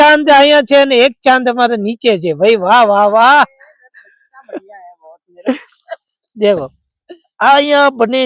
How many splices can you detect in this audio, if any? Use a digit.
0